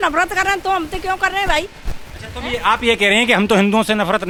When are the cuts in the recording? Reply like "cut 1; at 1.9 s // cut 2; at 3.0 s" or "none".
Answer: none